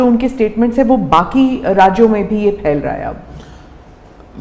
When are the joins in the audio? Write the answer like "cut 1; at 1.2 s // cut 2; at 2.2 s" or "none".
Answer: none